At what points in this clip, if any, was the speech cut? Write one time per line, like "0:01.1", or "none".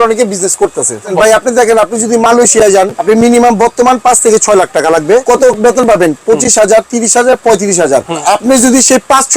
0:01.1
0:03.0
0:05.2
0:08.2